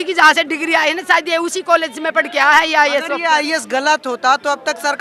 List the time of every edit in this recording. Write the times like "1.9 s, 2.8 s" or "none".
none